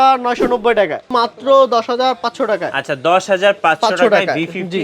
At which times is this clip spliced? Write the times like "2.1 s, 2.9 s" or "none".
1.1 s